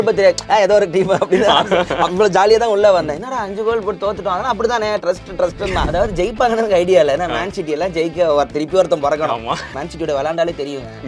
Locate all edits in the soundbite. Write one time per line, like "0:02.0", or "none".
0:05.9
0:09.7